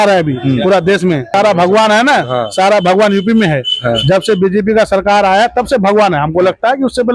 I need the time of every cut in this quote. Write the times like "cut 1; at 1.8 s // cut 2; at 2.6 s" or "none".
cut 1; at 1.3 s